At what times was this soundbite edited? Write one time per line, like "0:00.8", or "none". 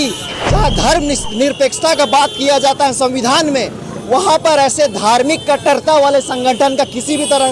none